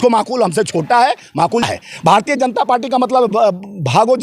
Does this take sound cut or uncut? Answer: cut